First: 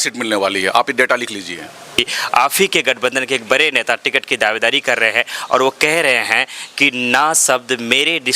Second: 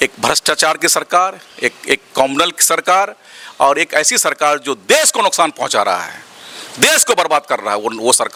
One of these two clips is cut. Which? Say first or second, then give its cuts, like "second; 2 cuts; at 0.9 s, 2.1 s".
first; 1 cut; at 2.0 s